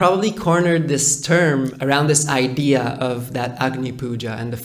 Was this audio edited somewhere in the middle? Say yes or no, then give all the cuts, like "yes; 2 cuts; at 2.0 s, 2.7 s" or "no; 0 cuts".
yes; 1 cut; at 1.7 s